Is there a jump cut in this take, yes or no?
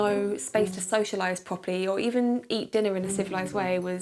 no